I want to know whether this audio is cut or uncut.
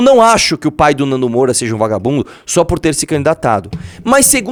uncut